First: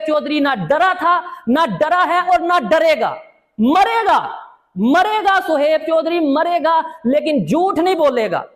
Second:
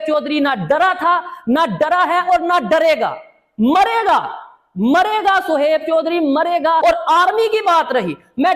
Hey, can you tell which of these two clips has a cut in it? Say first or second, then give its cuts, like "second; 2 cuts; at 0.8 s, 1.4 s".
second; 1 cut; at 6.8 s